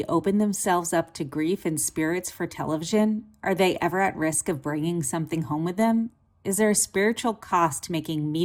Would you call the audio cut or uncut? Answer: uncut